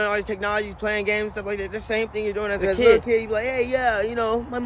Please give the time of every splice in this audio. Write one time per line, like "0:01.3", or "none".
0:02.9